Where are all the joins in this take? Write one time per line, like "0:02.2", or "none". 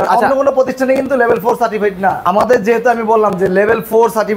0:02.2